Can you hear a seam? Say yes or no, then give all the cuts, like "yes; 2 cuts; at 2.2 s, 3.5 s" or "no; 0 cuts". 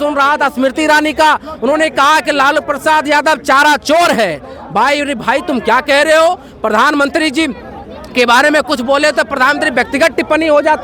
no; 0 cuts